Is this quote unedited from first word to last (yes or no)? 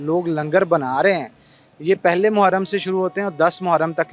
yes